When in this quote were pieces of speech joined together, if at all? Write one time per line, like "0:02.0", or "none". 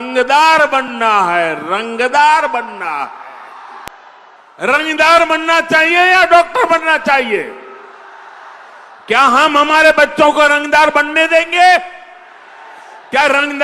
0:03.9

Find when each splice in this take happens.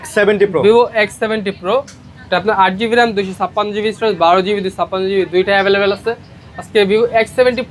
none

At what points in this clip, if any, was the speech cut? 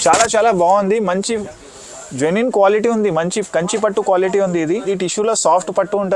0:04.8

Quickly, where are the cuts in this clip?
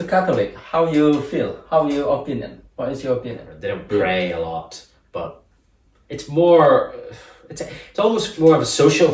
0:03.5

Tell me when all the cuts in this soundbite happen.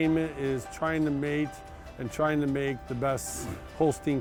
none

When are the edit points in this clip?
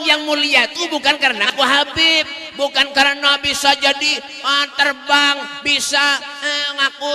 0:01.5

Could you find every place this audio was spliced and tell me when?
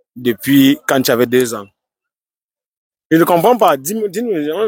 none

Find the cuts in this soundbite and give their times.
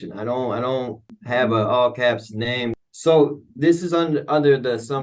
0:01.1
0:02.7

